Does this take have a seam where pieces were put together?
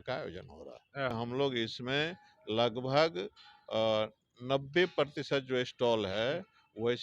yes; 1 cut; at 1.1 s

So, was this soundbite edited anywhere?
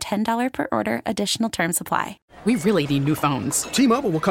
yes; 1 cut; at 2.2 s

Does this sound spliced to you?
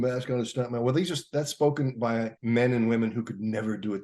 yes; 1 cut; at 2.4 s

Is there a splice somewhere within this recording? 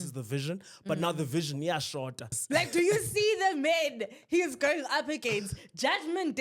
yes; 1 cut; at 2.3 s

